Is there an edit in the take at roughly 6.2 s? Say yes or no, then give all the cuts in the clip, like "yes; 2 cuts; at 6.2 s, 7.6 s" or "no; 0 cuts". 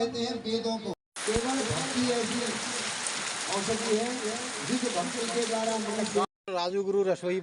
yes; 2 cuts; at 1.0 s, 6.2 s